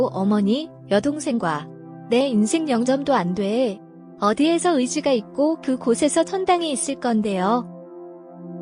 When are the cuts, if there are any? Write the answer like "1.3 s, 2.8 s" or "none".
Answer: 7.7 s